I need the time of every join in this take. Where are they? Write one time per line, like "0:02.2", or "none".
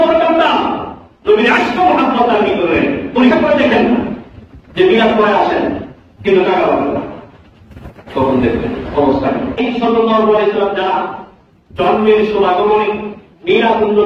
0:03.3
0:09.6